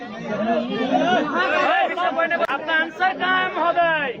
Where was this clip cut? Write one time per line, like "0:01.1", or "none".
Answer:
0:02.5